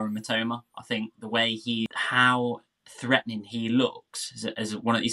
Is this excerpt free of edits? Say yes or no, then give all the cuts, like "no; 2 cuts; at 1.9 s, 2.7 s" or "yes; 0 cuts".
no; 1 cut; at 1.9 s